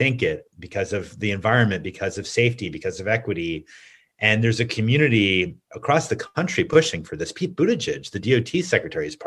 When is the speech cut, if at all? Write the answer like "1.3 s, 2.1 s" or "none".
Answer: none